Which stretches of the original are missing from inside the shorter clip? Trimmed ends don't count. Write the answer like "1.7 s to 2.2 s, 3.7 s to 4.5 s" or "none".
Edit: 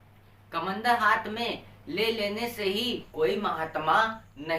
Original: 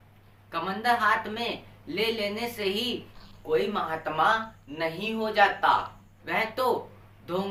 3.1 s to 3.4 s